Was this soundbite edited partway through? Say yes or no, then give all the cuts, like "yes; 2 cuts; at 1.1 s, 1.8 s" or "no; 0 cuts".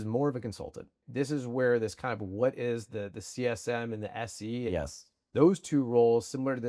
yes; 1 cut; at 1.0 s